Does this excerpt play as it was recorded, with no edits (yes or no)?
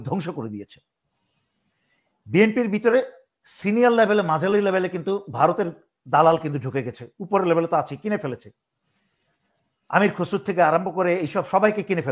yes